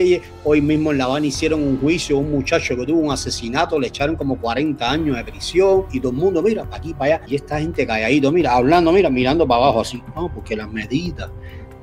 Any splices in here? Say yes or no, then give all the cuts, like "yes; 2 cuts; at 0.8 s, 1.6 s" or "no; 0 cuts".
yes; 1 cut; at 7.2 s